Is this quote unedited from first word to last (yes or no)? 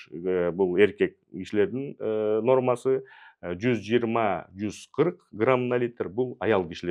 yes